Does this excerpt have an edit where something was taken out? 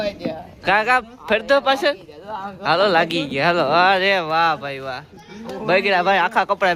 no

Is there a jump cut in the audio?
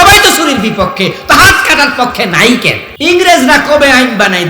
yes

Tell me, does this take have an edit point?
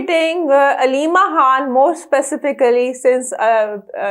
no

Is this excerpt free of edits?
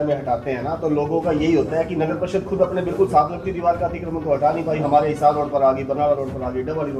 yes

